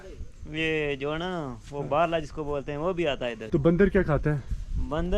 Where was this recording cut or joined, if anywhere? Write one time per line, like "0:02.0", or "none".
0:03.4